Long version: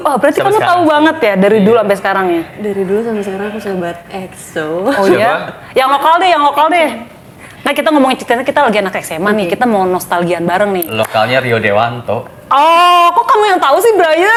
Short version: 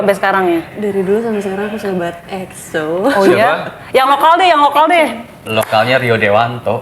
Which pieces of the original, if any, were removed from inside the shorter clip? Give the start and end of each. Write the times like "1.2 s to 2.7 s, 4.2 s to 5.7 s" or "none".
7.3 s to 10.9 s

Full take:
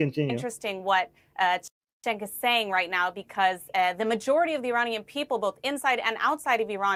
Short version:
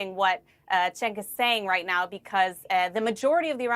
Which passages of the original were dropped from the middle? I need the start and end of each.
1.6 s to 2.0 s

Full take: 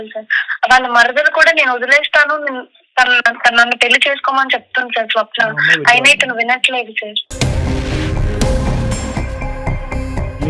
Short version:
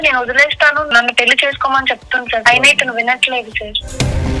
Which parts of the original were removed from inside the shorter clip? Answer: 2.4 s to 3.5 s, 5.1 s to 5.8 s

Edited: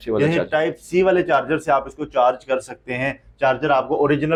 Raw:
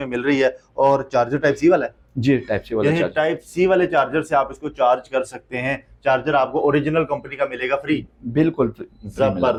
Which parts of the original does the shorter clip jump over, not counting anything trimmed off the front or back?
none

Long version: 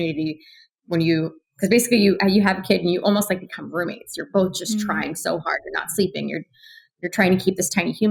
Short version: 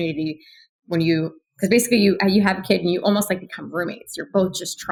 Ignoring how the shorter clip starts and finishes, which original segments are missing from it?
none

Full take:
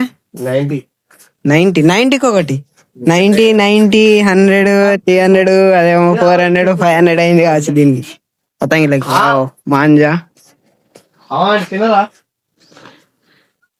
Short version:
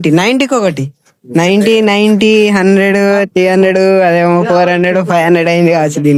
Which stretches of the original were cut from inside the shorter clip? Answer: none

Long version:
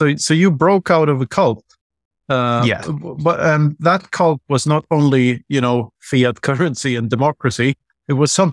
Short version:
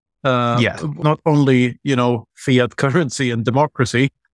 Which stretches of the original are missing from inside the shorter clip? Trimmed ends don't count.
3.0 s to 4.6 s

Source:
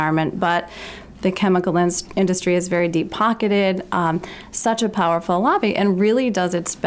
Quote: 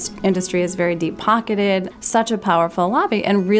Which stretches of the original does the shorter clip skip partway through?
3.8 s to 4.4 s

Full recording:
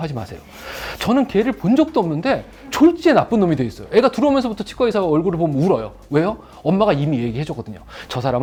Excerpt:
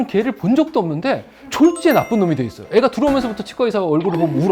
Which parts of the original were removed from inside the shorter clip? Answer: none

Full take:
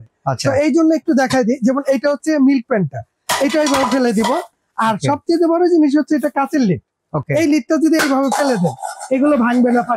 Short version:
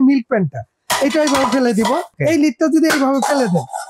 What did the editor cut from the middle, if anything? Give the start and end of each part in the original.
4.5 s to 7.2 s

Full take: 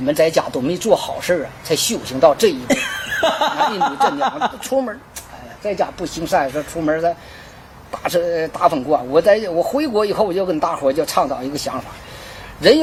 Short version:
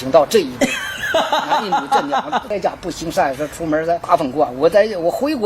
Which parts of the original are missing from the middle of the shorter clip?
4.5 s to 5.6 s, 7.2 s to 8.6 s

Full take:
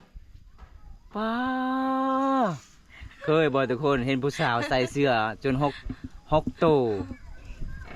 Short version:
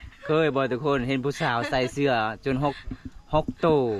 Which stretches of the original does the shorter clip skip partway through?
none

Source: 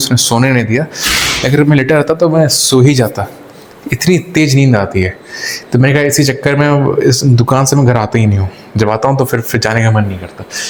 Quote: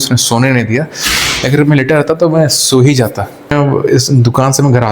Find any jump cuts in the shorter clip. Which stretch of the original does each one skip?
3.5 s to 6.6 s

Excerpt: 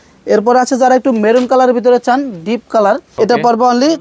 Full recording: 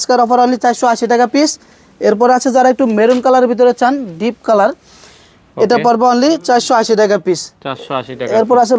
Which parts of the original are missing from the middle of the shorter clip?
4.8 s to 5.5 s

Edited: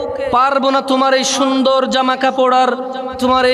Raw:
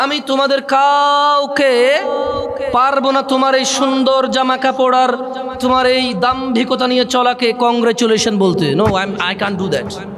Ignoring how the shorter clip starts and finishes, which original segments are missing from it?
none

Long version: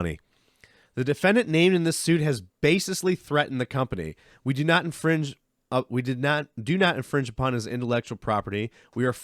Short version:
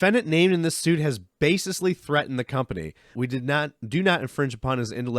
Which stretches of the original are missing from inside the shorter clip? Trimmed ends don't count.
4.4 s to 5.9 s

